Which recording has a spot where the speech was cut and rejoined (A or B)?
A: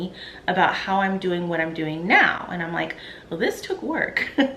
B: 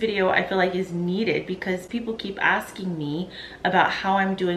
A